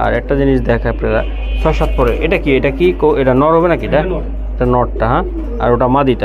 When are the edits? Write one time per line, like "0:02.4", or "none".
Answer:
none